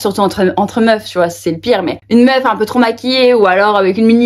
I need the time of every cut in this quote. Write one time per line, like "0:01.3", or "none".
none